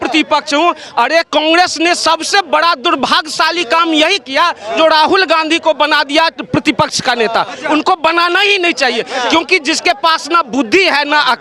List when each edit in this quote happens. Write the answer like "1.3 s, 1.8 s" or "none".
none